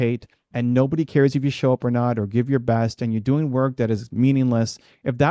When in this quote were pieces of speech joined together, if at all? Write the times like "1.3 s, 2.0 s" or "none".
none